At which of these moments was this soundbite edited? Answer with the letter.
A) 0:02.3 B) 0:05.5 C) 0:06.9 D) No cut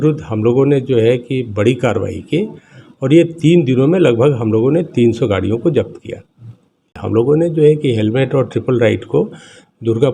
C